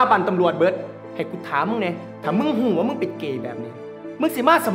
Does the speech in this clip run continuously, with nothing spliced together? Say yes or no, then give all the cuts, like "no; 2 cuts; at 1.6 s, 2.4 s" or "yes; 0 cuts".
no; 2 cuts; at 1.0 s, 2.1 s